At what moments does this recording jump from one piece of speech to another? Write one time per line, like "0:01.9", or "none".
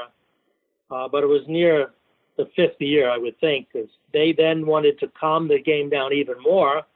0:04.0